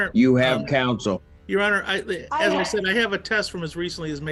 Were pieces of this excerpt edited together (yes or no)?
no